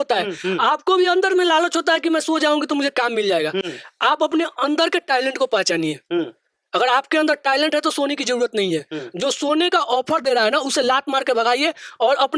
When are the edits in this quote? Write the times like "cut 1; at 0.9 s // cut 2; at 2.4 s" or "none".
none